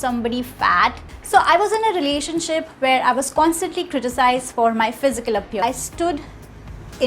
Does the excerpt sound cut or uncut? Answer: cut